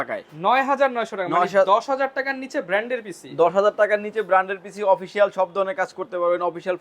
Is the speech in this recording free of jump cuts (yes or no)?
yes